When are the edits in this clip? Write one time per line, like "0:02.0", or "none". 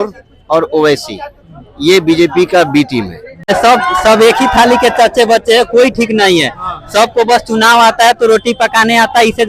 0:03.5